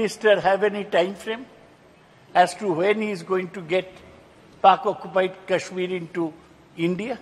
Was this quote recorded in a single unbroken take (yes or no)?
yes